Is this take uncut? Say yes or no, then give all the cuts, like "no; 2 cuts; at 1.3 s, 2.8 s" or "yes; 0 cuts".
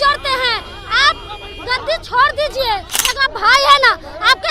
no; 1 cut; at 2.9 s